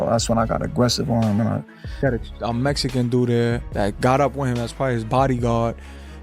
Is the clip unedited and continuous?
no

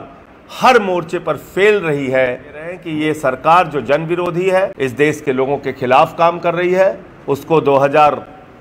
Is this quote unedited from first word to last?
no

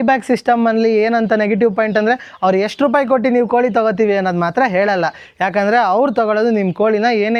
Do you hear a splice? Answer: no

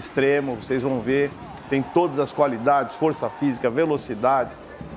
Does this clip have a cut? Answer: no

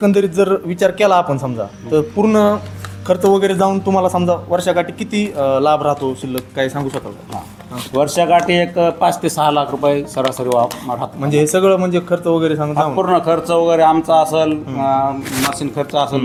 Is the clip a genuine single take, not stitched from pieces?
yes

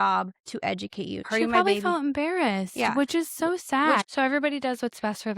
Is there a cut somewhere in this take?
yes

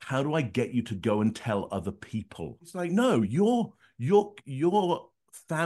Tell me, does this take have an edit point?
yes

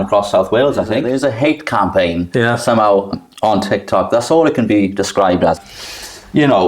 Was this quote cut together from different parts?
yes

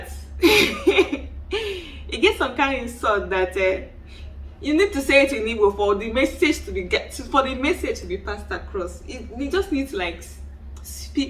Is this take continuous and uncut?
yes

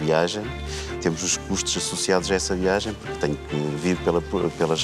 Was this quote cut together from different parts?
no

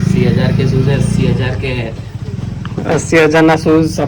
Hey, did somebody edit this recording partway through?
no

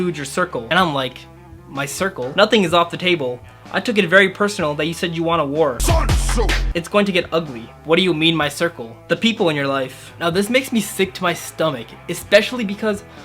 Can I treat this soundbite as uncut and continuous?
yes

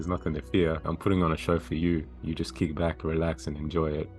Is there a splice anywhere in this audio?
yes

